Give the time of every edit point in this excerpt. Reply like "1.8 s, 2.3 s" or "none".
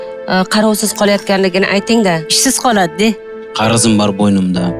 3.4 s